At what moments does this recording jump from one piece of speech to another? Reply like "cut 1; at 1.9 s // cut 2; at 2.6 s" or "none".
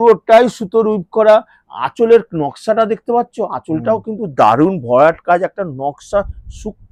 none